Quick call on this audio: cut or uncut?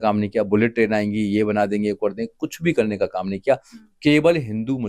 uncut